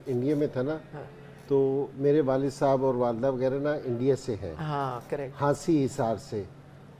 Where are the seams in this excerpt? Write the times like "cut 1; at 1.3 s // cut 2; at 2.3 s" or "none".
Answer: none